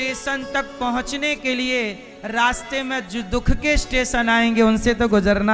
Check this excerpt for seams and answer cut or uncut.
uncut